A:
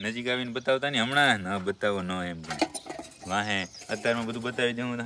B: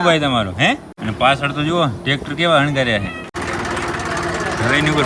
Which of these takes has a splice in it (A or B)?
B